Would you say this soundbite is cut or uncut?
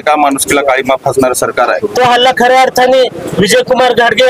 cut